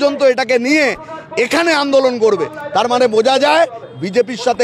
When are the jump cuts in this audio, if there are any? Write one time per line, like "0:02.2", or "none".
none